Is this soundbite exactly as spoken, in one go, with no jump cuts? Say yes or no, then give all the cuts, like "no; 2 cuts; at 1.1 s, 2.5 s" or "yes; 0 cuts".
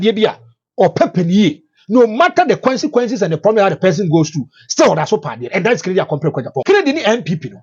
no; 1 cut; at 6.6 s